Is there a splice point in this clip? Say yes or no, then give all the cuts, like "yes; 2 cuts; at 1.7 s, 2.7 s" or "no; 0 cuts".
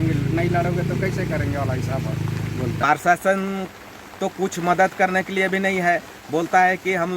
yes; 1 cut; at 2.8 s